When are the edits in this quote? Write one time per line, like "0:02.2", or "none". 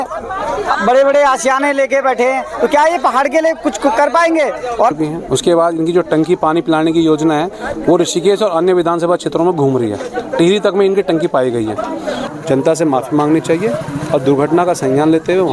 0:04.9
0:12.2